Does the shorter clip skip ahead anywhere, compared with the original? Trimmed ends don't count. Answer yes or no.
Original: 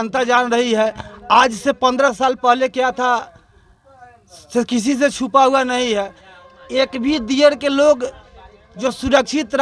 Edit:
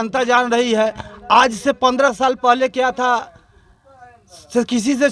no